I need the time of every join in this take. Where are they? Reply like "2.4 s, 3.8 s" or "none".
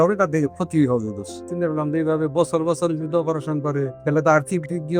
1.5 s, 3.9 s